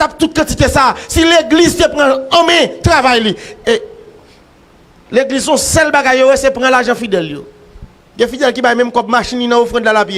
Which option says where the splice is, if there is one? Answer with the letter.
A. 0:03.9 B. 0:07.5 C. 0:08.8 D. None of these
B